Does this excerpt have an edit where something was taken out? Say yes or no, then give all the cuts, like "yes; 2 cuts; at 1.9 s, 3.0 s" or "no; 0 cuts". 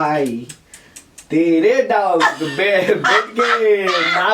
no; 0 cuts